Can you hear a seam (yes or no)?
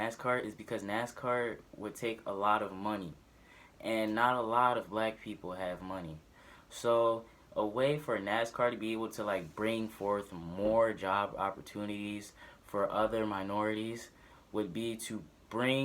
yes